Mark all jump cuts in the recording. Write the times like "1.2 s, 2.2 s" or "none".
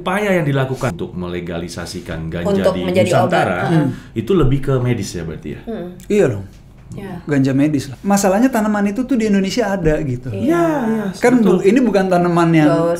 0.9 s, 7.9 s